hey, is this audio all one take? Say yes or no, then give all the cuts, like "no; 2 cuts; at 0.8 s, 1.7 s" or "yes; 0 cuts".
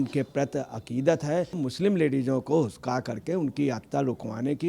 no; 1 cut; at 1.6 s